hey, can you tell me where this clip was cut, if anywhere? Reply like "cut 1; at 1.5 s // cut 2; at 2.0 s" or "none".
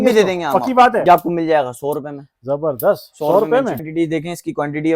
cut 1; at 1.0 s // cut 2; at 3.9 s